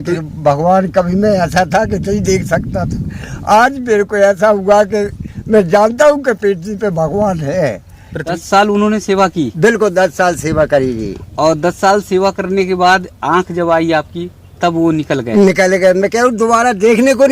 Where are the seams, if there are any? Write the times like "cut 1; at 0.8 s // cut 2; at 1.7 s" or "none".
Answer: cut 1; at 8.4 s